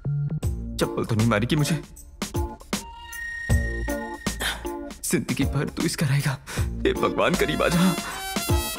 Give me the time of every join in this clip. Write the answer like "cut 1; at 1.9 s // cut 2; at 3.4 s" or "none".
none